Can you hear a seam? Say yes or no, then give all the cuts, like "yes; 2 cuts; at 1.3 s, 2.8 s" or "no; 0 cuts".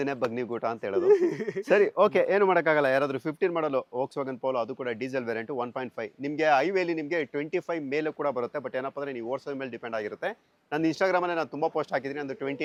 no; 0 cuts